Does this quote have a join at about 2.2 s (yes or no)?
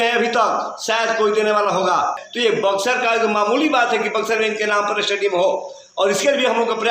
yes